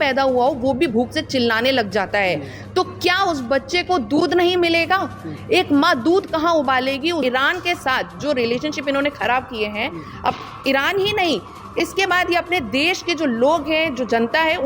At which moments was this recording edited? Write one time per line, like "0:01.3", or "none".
0:07.2